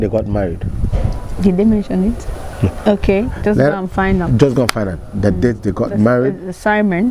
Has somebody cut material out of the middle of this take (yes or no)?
no